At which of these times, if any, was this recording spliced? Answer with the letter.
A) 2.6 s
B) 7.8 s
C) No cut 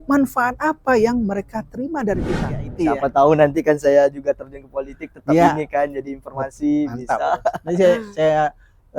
A